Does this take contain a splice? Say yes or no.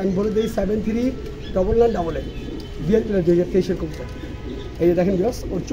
no